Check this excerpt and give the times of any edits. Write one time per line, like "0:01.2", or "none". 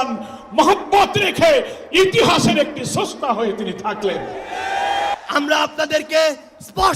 0:05.2